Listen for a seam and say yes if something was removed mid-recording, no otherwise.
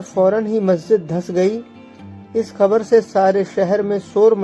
no